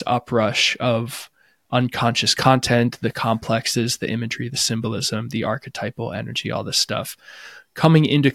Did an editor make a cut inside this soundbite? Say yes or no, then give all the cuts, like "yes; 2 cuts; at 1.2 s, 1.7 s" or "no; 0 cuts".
no; 0 cuts